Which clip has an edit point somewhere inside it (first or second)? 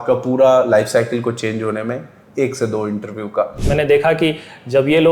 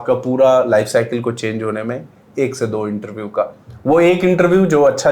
first